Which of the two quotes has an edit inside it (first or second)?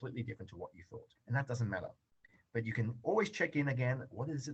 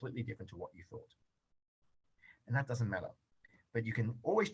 first